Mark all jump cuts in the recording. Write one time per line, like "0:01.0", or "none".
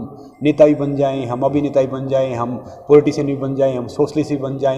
none